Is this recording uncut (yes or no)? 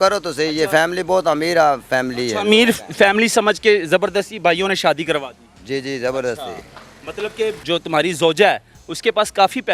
yes